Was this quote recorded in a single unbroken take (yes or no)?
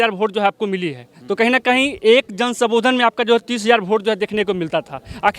yes